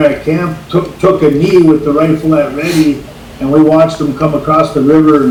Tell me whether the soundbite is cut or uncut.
uncut